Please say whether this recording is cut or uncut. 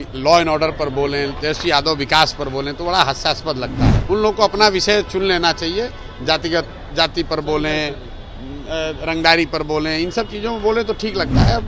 cut